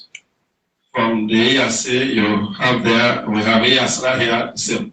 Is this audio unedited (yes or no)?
yes